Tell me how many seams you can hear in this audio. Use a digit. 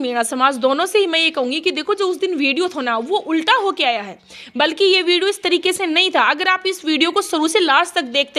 0